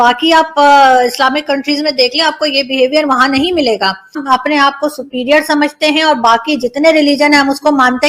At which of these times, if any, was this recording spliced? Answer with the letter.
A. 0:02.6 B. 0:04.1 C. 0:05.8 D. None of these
B